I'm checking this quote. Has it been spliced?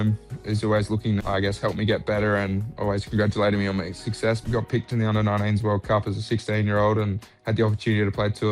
yes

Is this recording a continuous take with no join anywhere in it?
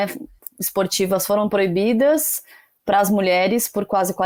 yes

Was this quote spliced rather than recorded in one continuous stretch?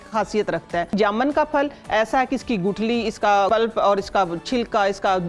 yes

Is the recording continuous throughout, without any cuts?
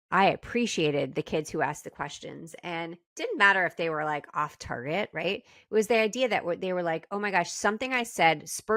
yes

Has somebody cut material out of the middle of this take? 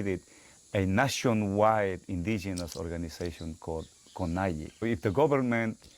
yes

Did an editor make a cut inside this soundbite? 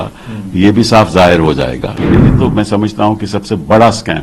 yes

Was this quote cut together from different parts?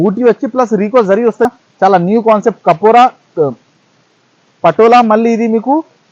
yes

